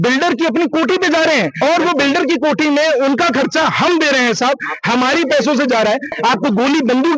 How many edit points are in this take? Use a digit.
2